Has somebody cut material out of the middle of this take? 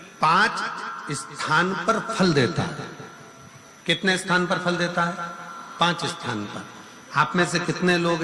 no; 0 cuts

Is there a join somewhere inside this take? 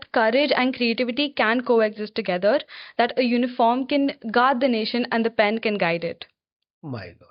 no; 0 cuts

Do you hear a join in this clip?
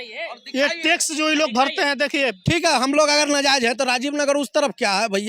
yes; 1 cut; at 2.4 s

